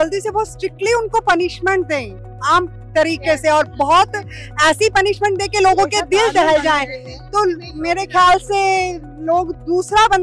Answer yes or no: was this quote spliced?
no